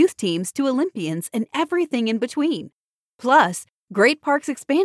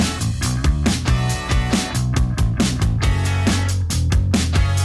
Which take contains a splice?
second; 1 cut; at 2.1 s

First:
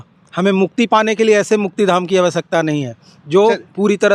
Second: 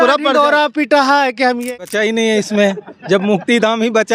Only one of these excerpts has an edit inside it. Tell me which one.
second; 1 cut; at 1.8 s

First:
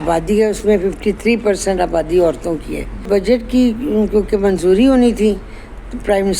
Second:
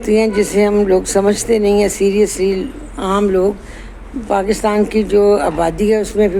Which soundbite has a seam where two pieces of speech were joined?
first; 1 cut; at 3.1 s

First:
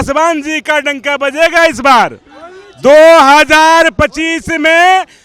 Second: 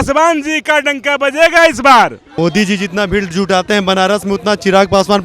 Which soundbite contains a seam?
second; 1 cut; at 2.2 s

